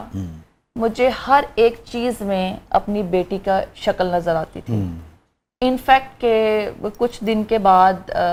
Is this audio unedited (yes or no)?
yes